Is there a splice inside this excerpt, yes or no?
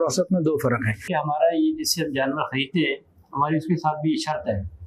yes